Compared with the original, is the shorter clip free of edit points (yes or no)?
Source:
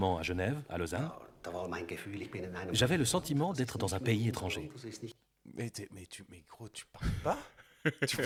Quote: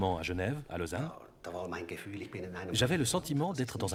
yes